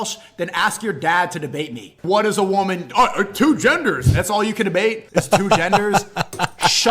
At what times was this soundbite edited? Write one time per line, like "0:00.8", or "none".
0:01.9
0:05.0